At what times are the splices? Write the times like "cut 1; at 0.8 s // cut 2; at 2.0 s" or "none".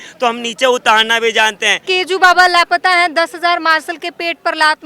cut 1; at 1.9 s